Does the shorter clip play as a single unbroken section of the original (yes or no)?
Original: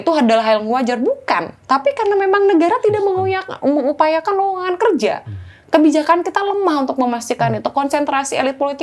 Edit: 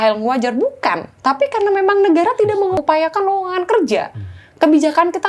no